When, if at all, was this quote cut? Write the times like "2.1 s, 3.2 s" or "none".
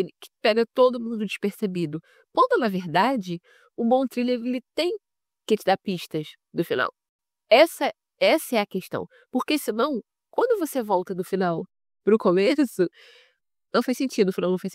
none